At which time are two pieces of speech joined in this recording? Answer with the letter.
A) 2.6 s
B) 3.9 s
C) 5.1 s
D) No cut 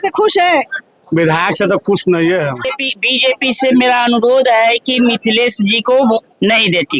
A